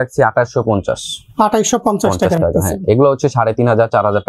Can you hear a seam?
no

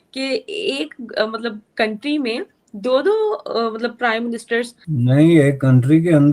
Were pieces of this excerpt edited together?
yes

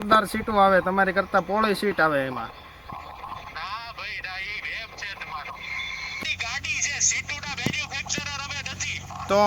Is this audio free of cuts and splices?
no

